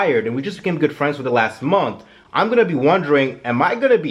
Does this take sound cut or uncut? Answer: uncut